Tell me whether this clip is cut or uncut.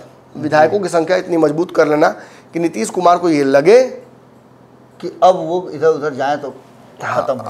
uncut